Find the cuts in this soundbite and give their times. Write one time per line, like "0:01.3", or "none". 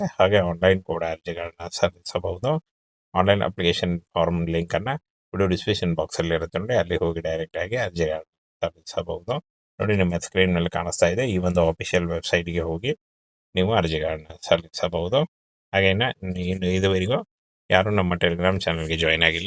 none